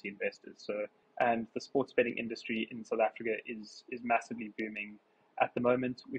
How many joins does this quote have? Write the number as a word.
one